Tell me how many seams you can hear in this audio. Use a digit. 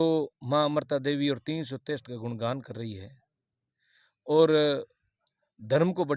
0